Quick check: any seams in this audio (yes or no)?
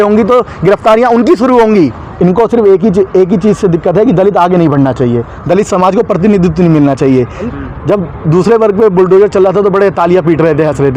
yes